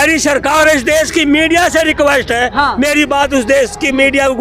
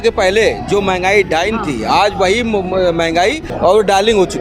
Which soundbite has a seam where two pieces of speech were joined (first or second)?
second